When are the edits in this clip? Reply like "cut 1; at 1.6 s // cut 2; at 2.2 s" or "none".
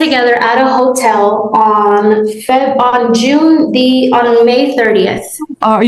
none